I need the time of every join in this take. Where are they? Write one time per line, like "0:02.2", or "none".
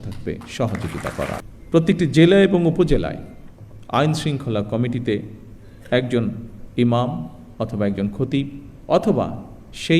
0:01.5